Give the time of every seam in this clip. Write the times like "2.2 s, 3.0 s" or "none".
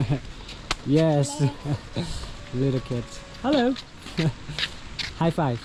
none